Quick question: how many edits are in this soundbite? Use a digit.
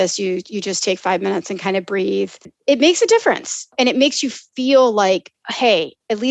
2